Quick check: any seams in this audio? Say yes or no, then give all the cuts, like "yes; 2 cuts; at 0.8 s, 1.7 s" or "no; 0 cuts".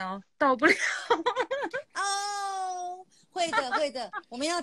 no; 0 cuts